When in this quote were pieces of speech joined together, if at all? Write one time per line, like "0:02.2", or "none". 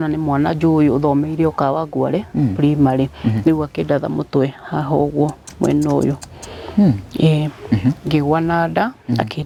none

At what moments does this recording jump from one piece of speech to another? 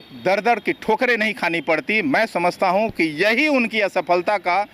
none

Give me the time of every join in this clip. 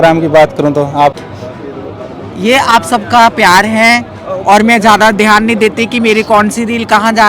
0:01.2

